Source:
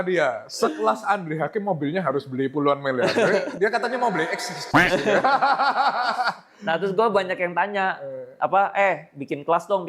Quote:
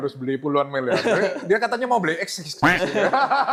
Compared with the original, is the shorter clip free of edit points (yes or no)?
yes